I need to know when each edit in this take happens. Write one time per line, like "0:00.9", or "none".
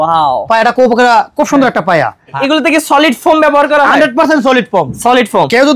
0:02.4